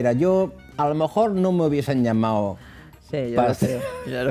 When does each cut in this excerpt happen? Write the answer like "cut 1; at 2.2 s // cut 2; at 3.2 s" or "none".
none